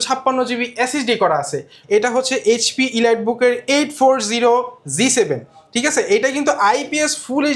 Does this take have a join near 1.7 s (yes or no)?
yes